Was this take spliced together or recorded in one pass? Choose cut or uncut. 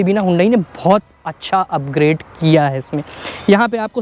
uncut